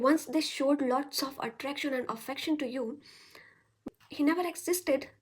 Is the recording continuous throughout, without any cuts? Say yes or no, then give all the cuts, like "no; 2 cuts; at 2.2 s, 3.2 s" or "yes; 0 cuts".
no; 1 cut; at 3.8 s